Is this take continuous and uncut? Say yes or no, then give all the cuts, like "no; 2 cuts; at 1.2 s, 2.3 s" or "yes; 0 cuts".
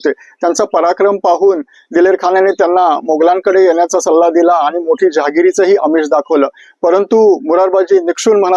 yes; 0 cuts